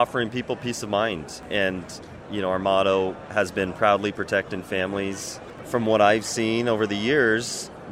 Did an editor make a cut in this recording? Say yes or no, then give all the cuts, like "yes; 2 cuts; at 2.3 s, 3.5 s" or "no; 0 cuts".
yes; 2 cuts; at 1.4 s, 5.6 s